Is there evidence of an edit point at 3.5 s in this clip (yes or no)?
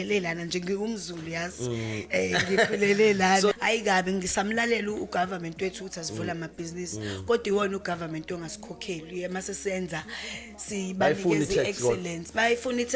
yes